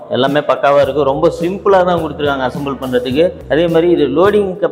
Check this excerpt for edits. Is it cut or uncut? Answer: cut